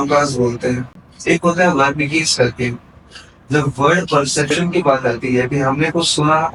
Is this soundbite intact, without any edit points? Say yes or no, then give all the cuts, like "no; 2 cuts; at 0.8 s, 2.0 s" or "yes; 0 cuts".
yes; 0 cuts